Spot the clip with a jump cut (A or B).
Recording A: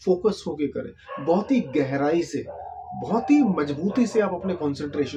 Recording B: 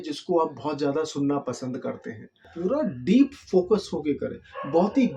B